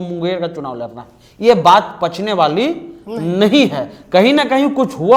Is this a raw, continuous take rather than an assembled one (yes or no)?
yes